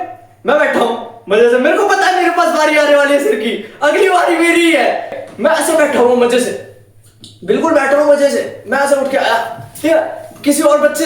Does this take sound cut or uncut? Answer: cut